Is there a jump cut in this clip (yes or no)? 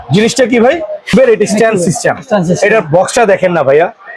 yes